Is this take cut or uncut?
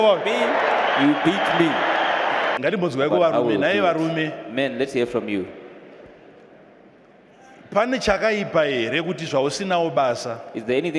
cut